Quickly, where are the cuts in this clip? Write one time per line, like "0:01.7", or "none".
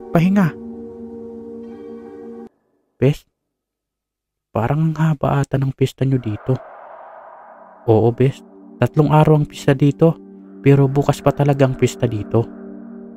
0:02.5